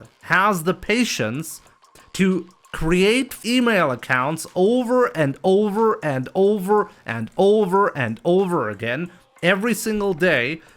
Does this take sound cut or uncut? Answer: cut